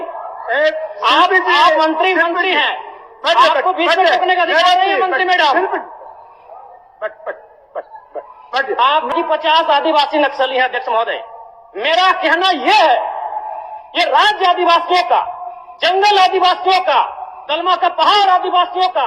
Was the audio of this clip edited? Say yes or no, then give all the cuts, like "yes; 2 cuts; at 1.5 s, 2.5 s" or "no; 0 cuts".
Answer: yes; 1 cut; at 9.1 s